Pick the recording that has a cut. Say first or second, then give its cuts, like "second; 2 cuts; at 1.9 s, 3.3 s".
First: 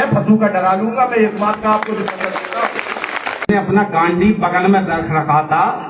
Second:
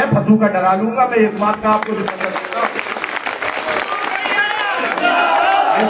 first; 1 cut; at 3.5 s